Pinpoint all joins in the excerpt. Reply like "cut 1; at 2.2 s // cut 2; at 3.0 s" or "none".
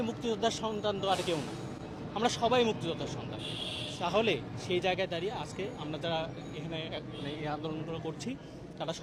none